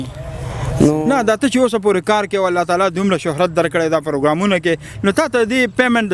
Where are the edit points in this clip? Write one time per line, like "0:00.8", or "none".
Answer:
0:01.0